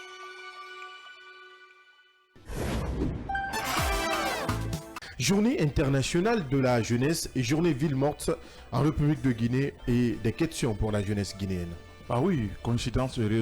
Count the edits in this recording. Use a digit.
1